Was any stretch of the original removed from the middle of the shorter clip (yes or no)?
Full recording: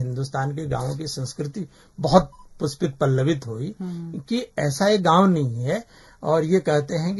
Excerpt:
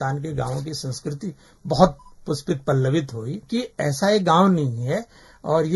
yes